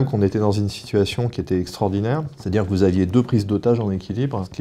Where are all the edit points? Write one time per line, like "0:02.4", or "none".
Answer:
0:02.3